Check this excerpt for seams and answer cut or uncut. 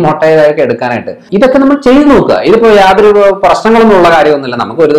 cut